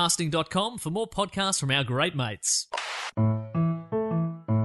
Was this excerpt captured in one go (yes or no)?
no